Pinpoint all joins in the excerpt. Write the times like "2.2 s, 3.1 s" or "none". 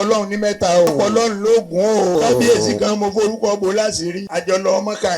0.9 s, 2.1 s, 4.2 s